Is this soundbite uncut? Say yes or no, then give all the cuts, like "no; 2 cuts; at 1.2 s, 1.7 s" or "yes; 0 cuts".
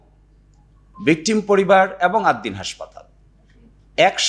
yes; 0 cuts